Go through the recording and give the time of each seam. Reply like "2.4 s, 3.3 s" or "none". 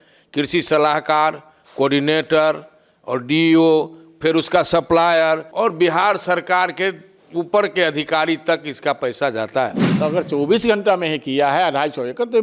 5.5 s, 9.8 s